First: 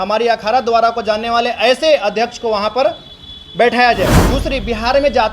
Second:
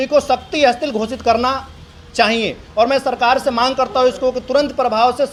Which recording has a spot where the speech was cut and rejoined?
first; 1 cut; at 4.2 s

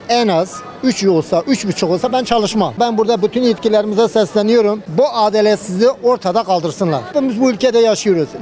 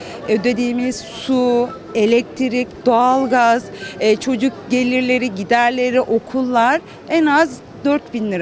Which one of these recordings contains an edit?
first; 3 cuts; at 2.8 s, 4.8 s, 7.1 s

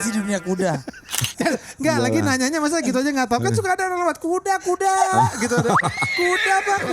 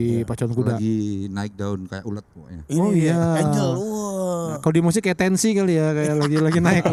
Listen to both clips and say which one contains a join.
first; 1 cut; at 1.2 s

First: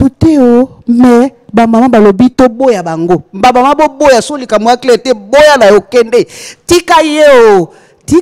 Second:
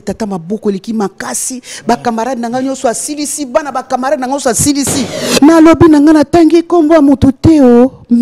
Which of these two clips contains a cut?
second; 1 cut; at 5.2 s

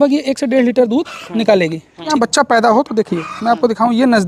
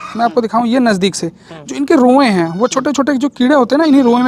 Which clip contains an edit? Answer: first; 1 cut; at 2.1 s

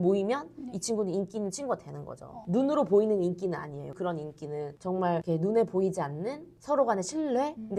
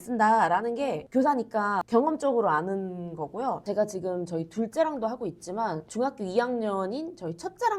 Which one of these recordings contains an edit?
second; 2 cuts; at 1.8 s, 3.6 s

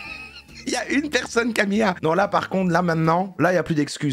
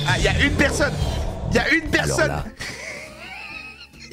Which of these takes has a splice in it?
first; 1 cut; at 2.0 s

